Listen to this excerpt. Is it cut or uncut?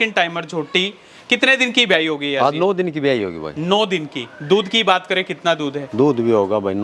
uncut